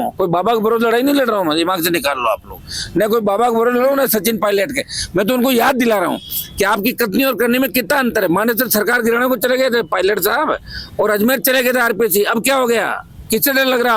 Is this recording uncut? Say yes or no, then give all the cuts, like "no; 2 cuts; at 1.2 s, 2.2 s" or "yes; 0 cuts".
yes; 0 cuts